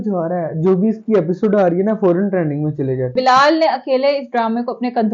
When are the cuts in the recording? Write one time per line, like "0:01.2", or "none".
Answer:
0:03.1